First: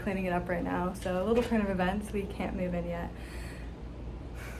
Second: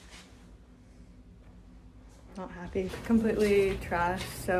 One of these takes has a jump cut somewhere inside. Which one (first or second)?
second